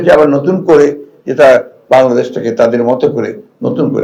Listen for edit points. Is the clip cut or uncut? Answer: uncut